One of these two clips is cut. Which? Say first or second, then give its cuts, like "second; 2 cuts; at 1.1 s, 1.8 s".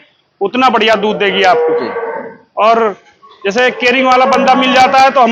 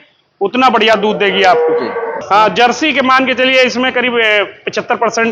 second; 1 cut; at 2.3 s